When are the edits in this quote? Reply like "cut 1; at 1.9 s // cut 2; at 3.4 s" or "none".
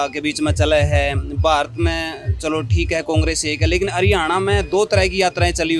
none